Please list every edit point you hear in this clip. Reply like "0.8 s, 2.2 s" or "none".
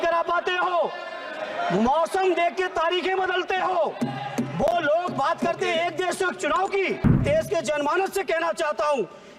7.2 s